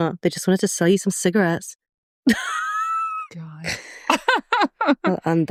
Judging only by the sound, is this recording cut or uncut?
uncut